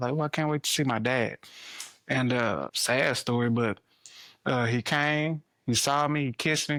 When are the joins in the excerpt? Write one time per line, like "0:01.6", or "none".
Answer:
none

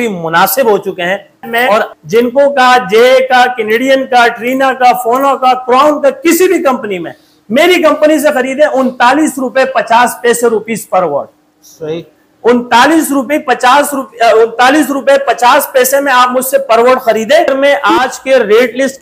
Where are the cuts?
0:01.9
0:17.5

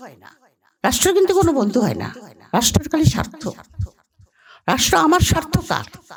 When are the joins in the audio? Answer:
none

